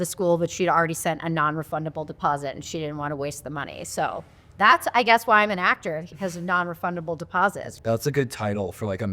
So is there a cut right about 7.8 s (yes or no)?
yes